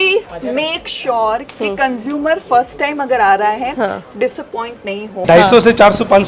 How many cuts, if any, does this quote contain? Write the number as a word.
one